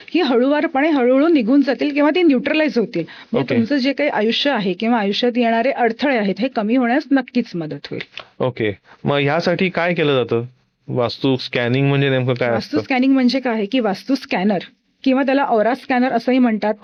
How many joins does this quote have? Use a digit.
0